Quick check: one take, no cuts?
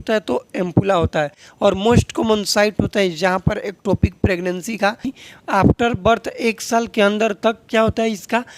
no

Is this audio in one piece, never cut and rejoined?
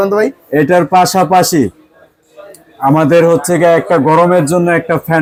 yes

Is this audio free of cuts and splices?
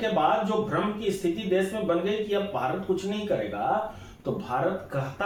yes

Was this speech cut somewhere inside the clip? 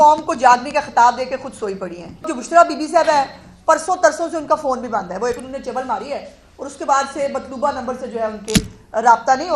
yes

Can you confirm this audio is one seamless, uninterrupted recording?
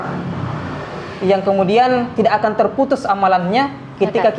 yes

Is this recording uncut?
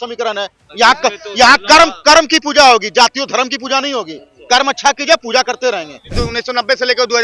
no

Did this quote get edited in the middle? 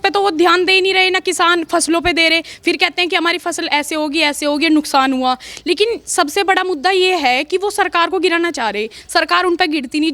no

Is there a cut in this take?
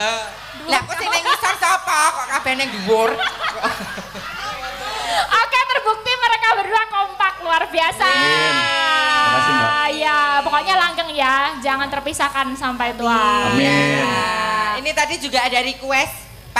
no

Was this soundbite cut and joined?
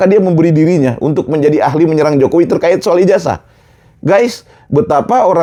no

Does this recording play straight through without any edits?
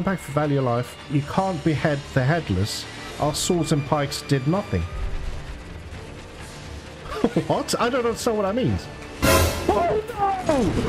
yes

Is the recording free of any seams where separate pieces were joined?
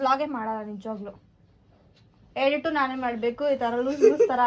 yes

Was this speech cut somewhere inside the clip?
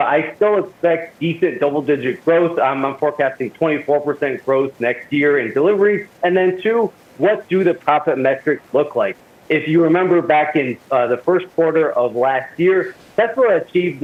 no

